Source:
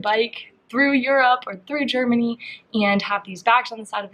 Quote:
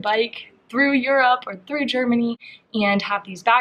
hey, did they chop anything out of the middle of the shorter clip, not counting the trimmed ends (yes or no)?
no